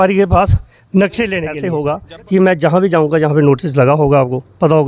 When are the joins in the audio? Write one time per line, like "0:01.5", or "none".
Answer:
0:01.6